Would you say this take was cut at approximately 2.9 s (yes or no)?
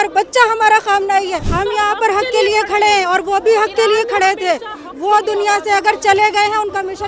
no